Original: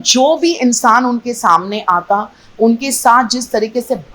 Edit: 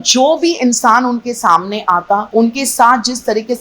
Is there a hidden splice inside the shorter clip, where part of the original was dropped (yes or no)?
yes